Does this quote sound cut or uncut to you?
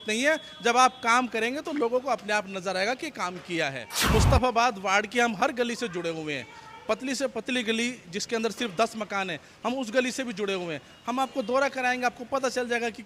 cut